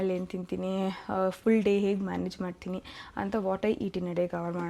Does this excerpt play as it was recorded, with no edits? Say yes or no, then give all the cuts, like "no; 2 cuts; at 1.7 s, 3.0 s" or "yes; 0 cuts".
yes; 0 cuts